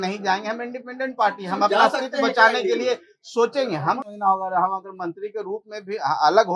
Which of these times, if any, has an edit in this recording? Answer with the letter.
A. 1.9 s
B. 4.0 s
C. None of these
B